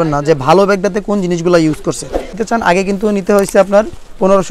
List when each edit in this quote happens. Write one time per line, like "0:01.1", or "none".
0:02.4